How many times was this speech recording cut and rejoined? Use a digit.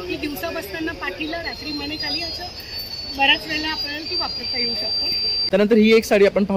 1